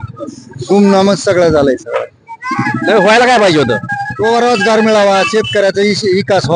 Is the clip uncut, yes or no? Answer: yes